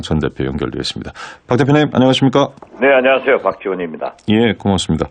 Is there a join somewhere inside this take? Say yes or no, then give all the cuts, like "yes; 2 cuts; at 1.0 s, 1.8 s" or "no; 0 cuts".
yes; 1 cut; at 1.9 s